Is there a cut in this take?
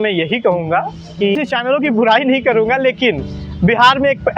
yes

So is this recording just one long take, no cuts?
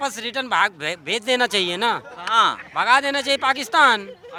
yes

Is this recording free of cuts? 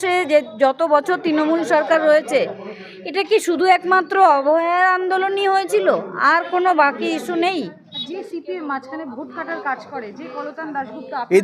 no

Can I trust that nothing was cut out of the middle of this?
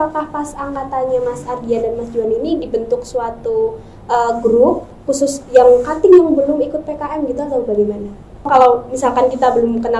no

